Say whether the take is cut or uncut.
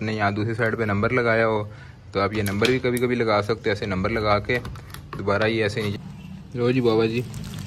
cut